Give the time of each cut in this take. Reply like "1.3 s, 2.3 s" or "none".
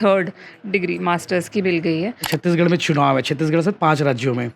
2.3 s